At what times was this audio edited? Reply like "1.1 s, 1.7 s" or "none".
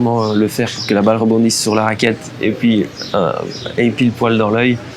none